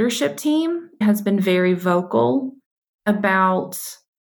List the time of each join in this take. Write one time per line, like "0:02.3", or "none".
0:01.0